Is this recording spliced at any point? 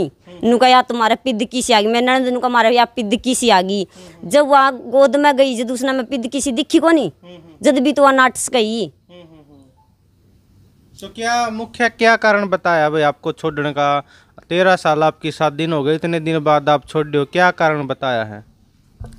no; 0 cuts

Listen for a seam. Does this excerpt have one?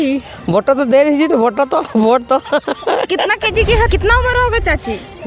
yes; 1 cut; at 3.9 s

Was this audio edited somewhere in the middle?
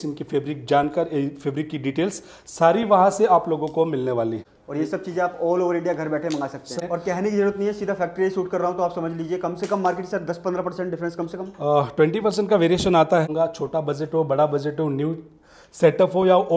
yes; 3 cuts; at 4.4 s, 6.8 s, 13.3 s

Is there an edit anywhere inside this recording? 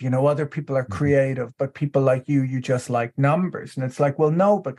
no; 0 cuts

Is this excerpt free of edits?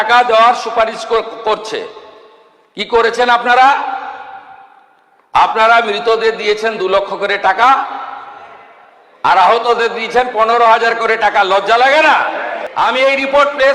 no; 1 cut; at 12.6 s

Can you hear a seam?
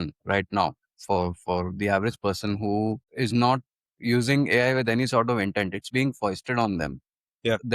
yes; 1 cut; at 3.1 s

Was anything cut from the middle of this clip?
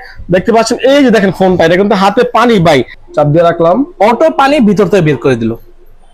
yes; 1 cut; at 2.9 s

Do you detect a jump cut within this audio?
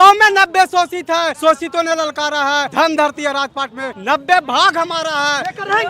yes; 3 cuts; at 1.4 s, 2.7 s, 3.9 s

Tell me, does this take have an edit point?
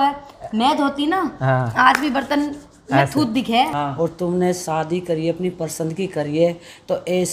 yes; 1 cut; at 3.7 s

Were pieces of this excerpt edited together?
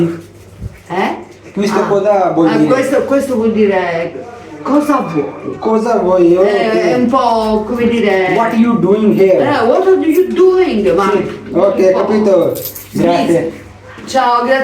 no; 0 cuts

